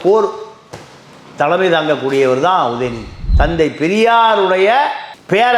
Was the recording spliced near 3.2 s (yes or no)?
yes